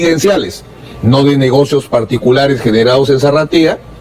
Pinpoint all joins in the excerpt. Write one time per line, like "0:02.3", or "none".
none